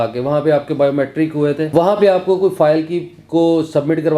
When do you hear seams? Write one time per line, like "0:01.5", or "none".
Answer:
0:01.7